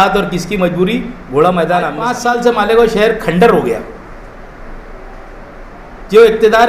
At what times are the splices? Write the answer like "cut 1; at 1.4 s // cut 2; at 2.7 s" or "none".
cut 1; at 2.0 s